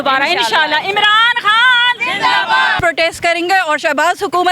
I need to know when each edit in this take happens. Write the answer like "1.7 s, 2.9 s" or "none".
2.8 s

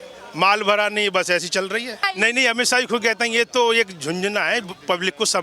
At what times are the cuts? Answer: 2.1 s

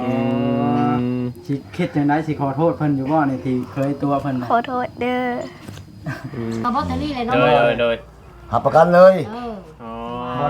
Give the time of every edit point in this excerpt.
6.6 s

